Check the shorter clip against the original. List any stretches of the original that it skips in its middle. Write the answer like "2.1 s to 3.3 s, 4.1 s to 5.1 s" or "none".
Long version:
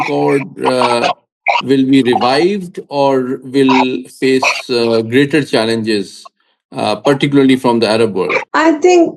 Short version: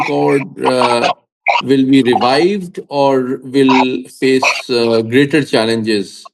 none